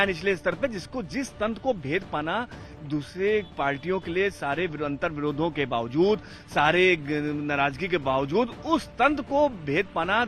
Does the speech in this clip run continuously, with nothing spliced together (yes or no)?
yes